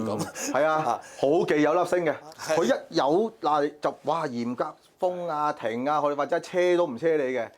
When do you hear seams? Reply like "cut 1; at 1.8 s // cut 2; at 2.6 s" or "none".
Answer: cut 1; at 2.2 s